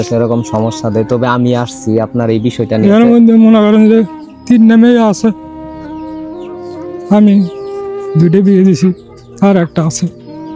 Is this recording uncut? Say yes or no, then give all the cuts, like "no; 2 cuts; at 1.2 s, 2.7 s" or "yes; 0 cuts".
no; 2 cuts; at 5.5 s, 7.1 s